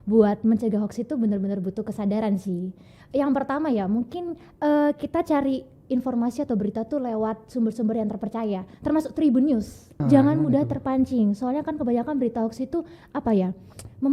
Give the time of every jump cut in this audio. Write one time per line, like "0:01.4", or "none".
0:09.9